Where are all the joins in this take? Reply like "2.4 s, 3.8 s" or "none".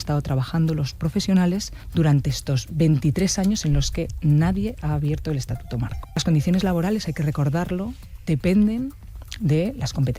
6.2 s